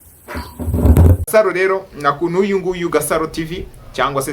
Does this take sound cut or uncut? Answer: cut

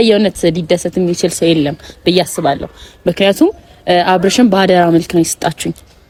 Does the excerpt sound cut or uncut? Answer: uncut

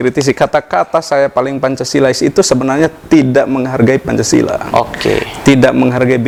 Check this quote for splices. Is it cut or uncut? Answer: uncut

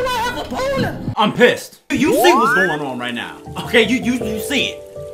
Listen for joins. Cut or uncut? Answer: cut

